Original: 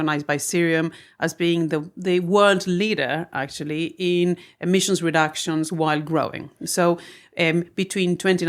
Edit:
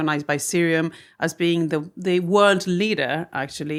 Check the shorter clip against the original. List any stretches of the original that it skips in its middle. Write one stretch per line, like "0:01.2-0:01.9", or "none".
none